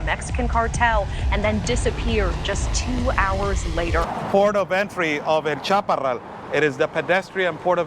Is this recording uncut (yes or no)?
no